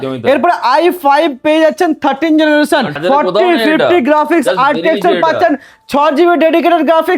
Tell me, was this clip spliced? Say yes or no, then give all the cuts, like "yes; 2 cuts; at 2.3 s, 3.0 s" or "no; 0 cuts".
yes; 1 cut; at 3.0 s